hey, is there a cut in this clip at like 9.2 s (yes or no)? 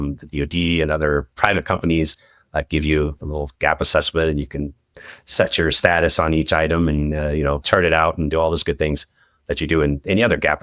no